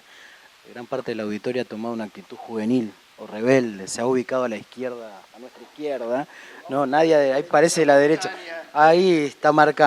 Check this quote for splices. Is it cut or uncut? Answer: cut